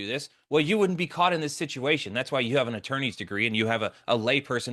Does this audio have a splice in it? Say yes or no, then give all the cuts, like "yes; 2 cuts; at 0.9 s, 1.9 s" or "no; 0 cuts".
no; 0 cuts